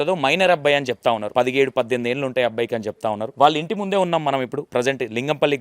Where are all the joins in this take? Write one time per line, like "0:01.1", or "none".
0:01.2
0:03.3
0:04.6